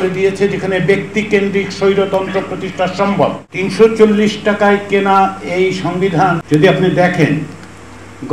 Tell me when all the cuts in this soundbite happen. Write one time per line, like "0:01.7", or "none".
0:03.4
0:06.4

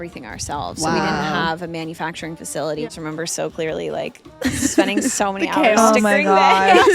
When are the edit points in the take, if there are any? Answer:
0:02.9

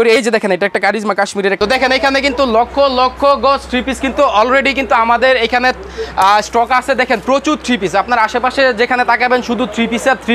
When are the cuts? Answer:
0:01.6

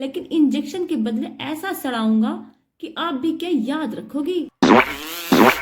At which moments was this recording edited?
0:04.5

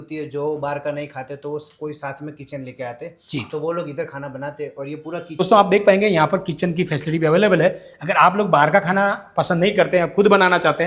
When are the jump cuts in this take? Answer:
0:05.4

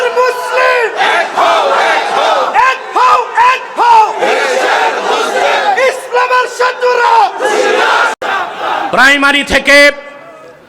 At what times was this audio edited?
0:08.9

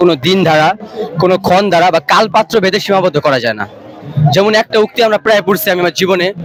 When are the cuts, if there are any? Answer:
none

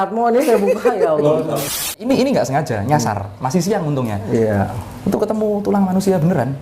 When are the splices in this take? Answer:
0:02.0

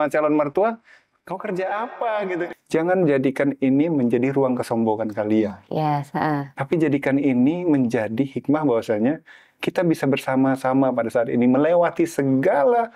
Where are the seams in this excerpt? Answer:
0:02.5

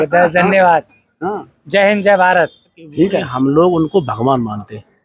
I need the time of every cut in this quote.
0:03.2

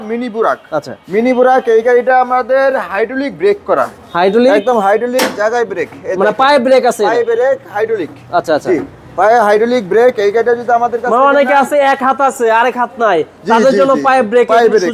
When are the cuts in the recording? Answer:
none

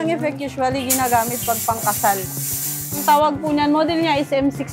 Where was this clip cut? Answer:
0:02.9

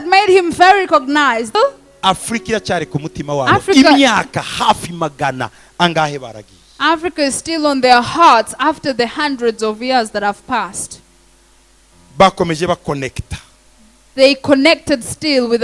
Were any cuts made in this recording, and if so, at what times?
0:01.5

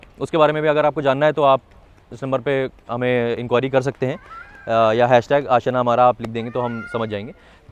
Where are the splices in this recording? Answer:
none

